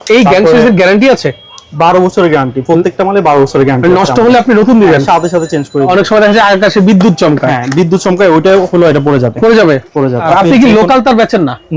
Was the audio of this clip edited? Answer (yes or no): yes